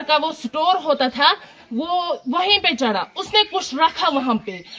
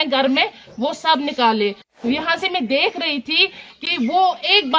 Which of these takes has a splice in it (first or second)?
second